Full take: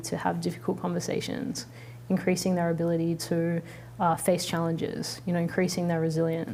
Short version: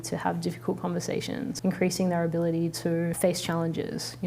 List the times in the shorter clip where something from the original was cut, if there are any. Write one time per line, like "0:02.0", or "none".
0:01.6
0:03.2